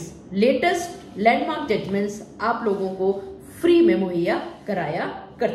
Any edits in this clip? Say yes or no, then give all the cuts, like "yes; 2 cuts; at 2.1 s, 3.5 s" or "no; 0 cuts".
no; 0 cuts